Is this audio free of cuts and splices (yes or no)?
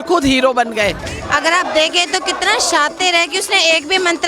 no